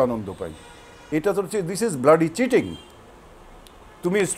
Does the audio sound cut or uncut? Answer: cut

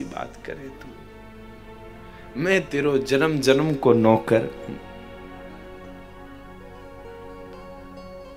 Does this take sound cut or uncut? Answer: uncut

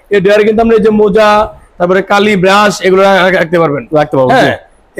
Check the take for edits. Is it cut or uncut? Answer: uncut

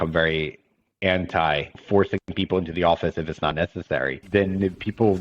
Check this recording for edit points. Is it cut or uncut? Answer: cut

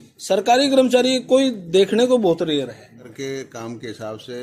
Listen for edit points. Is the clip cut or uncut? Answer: cut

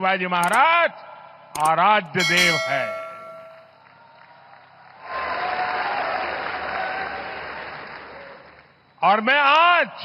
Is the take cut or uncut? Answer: uncut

